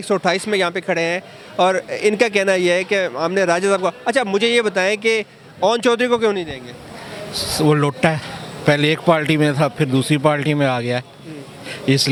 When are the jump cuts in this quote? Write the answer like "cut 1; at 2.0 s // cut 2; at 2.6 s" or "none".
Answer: none